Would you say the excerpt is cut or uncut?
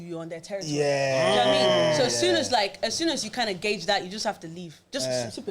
uncut